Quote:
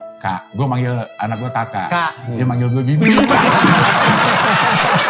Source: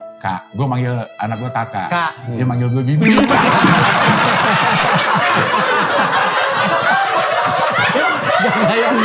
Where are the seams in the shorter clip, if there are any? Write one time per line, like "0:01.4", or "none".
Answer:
none